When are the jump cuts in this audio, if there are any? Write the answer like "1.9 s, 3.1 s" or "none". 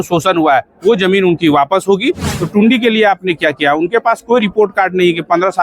2.3 s